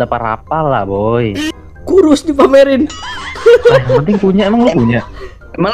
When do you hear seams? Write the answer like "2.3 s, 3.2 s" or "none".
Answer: 1.5 s